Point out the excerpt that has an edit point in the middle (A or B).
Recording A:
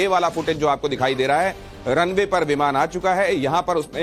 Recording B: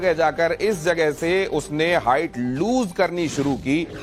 B